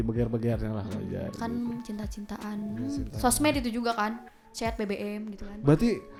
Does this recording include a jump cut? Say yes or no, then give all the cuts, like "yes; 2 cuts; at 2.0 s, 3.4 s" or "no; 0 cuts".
no; 0 cuts